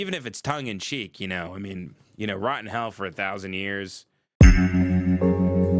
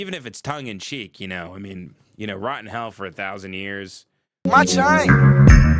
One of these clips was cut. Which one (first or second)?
first